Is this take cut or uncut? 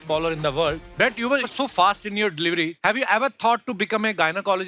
cut